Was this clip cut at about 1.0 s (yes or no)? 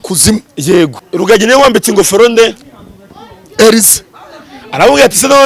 yes